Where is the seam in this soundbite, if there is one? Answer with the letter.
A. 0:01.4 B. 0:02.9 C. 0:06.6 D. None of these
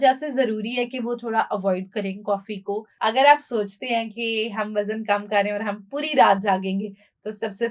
B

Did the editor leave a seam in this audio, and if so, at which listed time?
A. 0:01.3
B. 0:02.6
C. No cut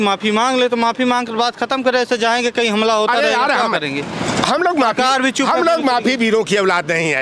C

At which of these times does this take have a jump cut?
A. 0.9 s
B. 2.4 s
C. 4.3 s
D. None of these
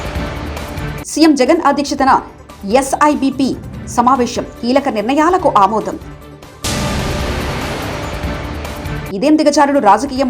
A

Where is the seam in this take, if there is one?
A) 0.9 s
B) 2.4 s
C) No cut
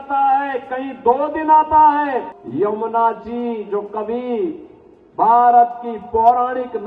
B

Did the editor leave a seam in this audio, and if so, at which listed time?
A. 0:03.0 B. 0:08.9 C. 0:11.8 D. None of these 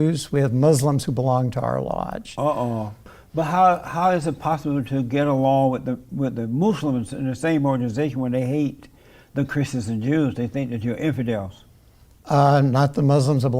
A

